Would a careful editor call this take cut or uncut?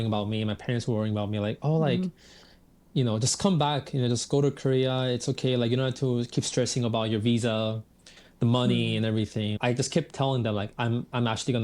cut